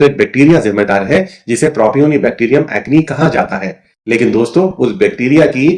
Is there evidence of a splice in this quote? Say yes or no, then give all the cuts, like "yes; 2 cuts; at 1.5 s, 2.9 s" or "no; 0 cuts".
no; 0 cuts